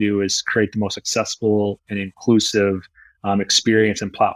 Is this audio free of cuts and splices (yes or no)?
yes